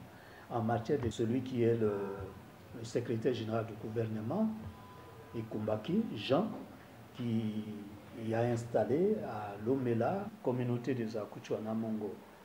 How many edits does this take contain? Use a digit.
2